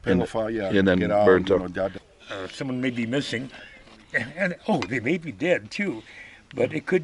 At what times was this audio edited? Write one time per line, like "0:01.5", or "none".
0:02.0